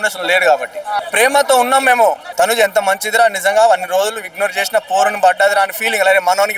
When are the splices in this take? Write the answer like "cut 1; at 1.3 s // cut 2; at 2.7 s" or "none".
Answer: cut 1; at 1.0 s // cut 2; at 2.2 s

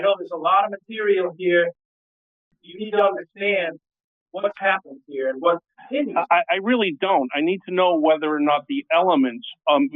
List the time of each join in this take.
cut 1; at 2.2 s

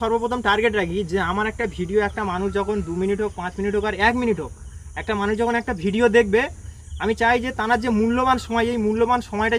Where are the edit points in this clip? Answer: none

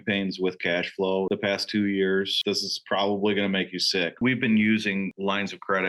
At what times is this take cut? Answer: cut 1; at 1.3 s // cut 2; at 2.4 s // cut 3; at 4.2 s

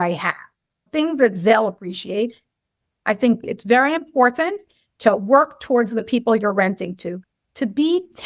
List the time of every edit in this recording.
cut 1; at 2.4 s

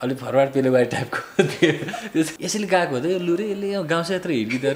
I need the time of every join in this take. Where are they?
cut 1; at 2.3 s

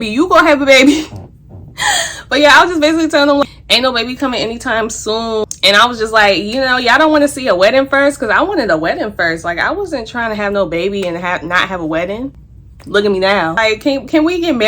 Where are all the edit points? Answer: cut 1; at 3.4 s // cut 2; at 13.5 s

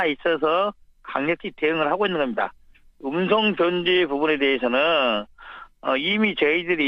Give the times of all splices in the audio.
cut 1; at 1.2 s

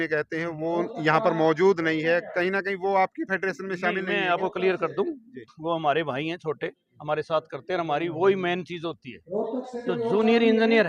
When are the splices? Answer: none

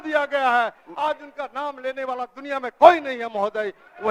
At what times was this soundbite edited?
none

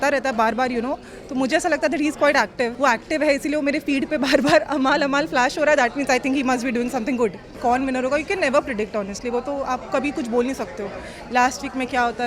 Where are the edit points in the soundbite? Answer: cut 1; at 2.7 s // cut 2; at 7.5 s

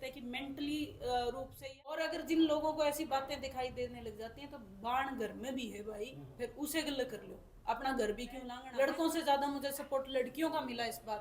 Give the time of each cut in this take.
cut 1; at 1.6 s // cut 2; at 8.6 s

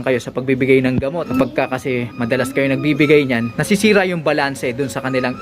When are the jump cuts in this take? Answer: cut 1; at 1.3 s // cut 2; at 3.5 s

